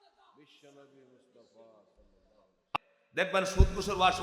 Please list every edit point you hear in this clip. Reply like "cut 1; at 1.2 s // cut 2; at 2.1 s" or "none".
cut 1; at 2.7 s